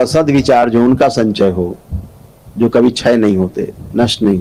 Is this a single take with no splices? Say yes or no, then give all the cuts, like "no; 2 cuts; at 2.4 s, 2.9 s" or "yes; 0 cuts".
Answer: yes; 0 cuts